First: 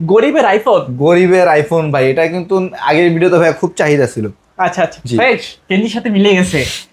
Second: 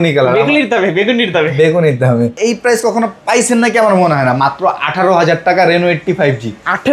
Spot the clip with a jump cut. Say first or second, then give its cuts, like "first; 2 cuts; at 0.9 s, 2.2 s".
second; 1 cut; at 2.4 s